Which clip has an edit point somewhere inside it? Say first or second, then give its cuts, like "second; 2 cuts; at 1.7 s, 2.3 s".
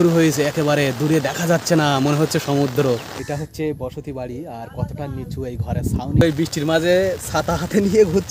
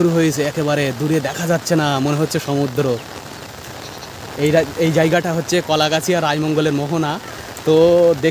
first; 2 cuts; at 3.2 s, 6.2 s